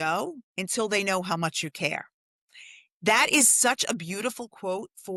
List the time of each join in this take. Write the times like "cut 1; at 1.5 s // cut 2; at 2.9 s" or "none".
none